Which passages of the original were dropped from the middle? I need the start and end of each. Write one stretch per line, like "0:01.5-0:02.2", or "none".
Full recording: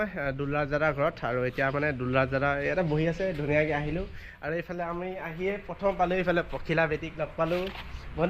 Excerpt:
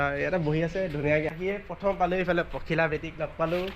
0:03.8-0:05.3